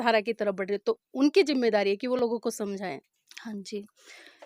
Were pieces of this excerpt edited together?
no; 0 cuts

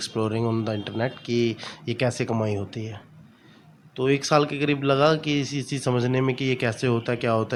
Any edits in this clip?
no; 0 cuts

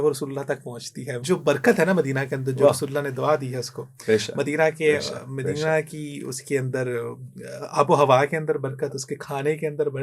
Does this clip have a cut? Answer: yes; 1 cut; at 1.2 s

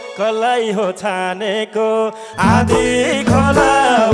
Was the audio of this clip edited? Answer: no; 0 cuts

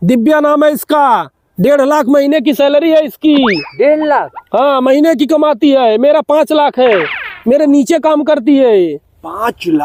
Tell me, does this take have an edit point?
no; 0 cuts

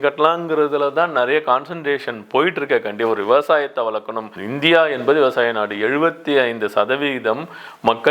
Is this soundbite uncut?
yes; 0 cuts

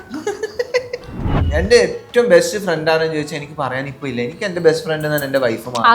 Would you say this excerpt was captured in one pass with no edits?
no; 1 cut; at 1.4 s

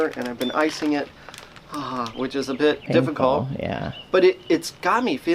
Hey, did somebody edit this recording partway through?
no; 0 cuts

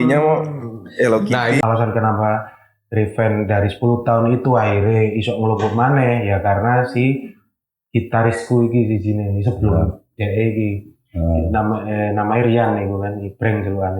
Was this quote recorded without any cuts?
no; 1 cut; at 1.6 s

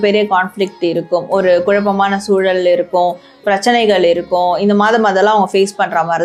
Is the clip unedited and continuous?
yes; 0 cuts

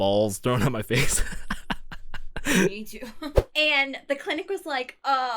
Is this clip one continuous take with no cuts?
no; 1 cut; at 3.3 s

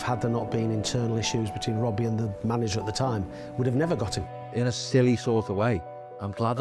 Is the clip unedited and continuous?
no; 1 cut; at 4.4 s

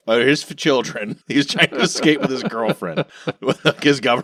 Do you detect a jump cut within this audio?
no; 0 cuts

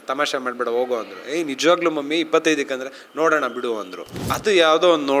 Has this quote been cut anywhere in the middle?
yes; 1 cut; at 4.3 s

